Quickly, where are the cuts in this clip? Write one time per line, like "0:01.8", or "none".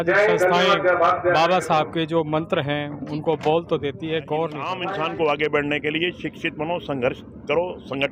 0:04.8